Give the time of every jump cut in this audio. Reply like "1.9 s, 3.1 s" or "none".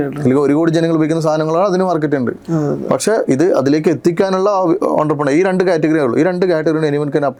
none